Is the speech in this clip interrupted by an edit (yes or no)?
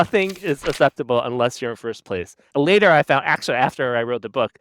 yes